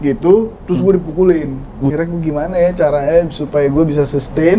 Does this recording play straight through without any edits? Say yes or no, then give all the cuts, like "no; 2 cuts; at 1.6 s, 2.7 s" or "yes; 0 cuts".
no; 1 cut; at 1.9 s